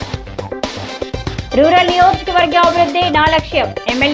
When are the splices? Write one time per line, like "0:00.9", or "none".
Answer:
0:01.4